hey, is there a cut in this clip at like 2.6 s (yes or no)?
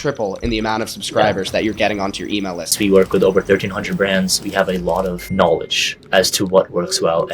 yes